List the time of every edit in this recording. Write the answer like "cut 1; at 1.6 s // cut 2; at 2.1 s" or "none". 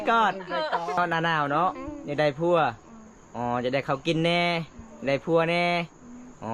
cut 1; at 1.0 s